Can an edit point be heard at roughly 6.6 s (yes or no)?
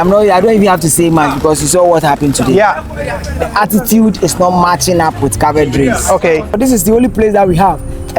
yes